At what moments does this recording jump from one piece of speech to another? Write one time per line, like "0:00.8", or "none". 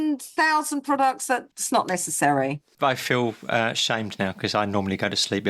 0:01.5
0:02.7